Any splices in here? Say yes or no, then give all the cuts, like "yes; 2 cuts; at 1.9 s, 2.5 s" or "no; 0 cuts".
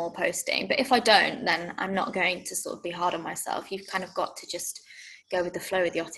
no; 0 cuts